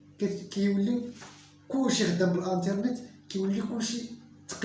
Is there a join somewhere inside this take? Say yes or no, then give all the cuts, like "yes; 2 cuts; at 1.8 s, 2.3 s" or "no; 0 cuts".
no; 0 cuts